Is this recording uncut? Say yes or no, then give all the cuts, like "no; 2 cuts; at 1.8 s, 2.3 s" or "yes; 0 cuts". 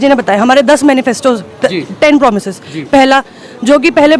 yes; 0 cuts